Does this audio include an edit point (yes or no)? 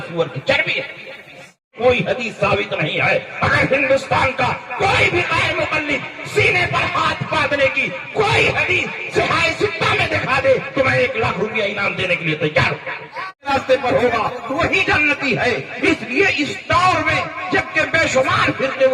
yes